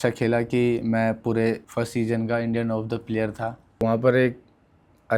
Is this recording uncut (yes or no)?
no